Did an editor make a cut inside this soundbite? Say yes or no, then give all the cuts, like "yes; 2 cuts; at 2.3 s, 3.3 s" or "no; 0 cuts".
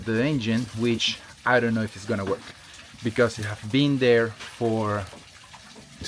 no; 0 cuts